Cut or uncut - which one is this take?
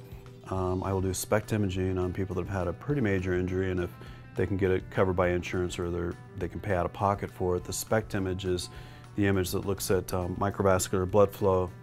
uncut